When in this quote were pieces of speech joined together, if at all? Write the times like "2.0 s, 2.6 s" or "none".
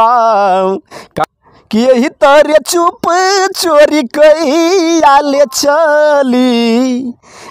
1.0 s

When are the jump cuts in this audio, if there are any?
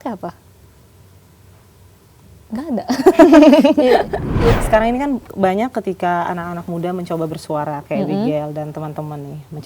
4.5 s

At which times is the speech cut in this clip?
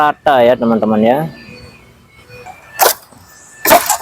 2.4 s

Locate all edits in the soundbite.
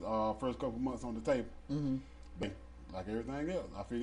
2.4 s

